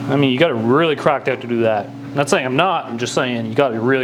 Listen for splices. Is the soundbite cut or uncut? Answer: uncut